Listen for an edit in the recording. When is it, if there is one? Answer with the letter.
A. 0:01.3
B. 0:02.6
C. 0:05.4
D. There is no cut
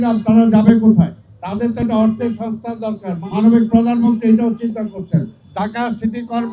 C